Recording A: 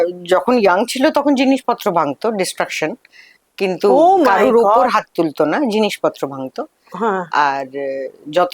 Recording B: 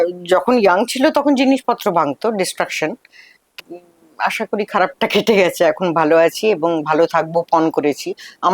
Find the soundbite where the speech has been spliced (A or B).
B